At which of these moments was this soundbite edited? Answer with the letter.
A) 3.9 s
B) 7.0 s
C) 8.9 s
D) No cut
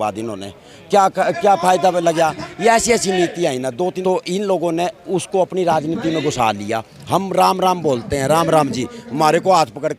A